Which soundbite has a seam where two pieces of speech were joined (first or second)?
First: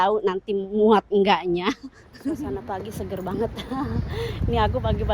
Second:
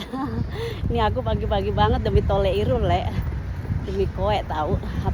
first